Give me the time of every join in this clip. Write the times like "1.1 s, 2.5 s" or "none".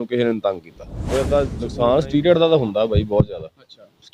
1.6 s